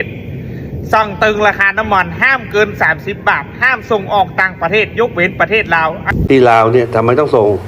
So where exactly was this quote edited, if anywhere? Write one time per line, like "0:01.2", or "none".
0:06.2